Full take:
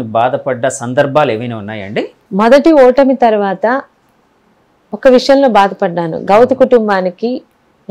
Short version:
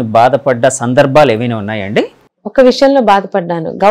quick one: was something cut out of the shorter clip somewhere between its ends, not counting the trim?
yes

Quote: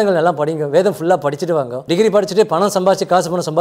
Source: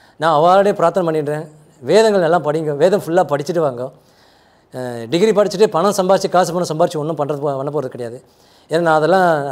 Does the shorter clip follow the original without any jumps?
no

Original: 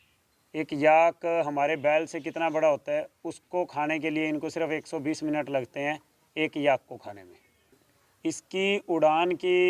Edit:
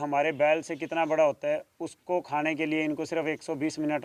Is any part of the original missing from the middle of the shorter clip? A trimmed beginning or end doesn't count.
no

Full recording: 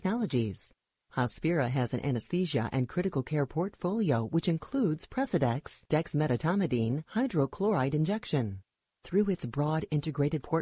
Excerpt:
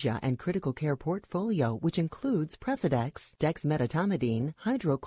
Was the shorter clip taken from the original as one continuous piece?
yes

